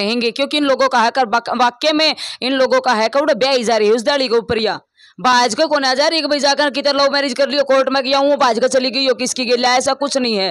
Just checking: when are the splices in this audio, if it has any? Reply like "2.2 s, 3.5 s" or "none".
none